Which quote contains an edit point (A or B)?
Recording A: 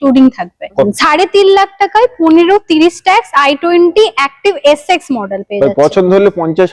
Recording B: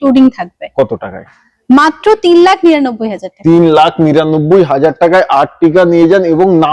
A